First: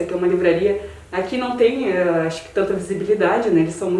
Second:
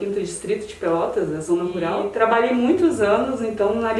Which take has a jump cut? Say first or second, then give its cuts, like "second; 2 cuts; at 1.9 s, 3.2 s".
second; 1 cut; at 2.0 s